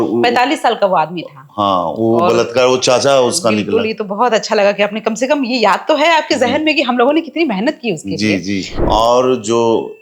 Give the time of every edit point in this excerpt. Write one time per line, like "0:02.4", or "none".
0:08.7

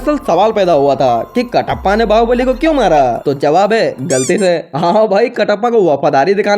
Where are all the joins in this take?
0:03.2

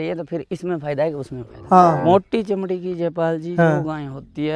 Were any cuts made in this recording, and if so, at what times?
0:02.0

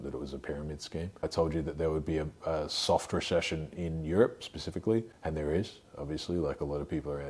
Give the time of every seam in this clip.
0:01.2
0:05.1

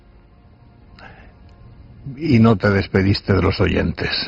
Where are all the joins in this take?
0:03.3

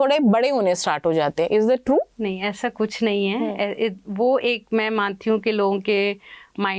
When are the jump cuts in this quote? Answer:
0:02.1

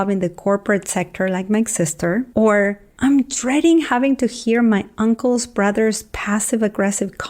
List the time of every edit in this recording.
0:02.3

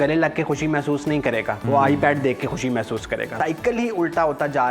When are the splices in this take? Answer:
0:01.6
0:03.3

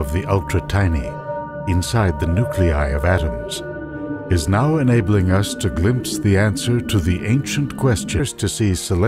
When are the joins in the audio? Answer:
none

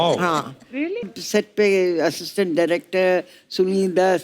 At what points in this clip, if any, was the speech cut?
0:01.1

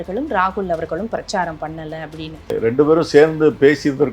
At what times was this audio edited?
0:02.5

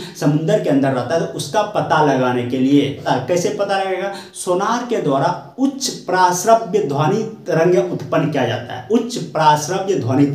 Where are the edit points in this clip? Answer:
0:03.0

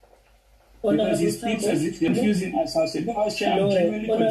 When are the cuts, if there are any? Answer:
0:02.1

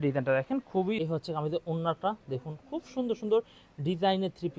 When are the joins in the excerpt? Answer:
0:01.0

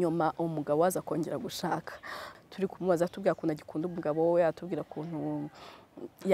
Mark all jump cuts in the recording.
0:02.2

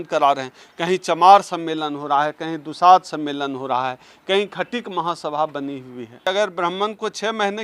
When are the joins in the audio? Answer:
0:06.2

